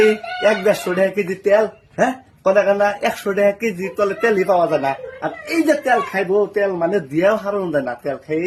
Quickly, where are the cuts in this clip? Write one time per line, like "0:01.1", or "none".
none